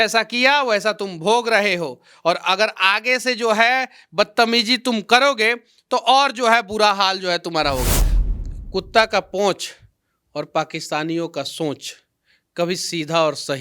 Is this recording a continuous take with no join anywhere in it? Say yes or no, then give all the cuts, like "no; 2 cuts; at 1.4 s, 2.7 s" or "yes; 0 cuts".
no; 1 cut; at 8.0 s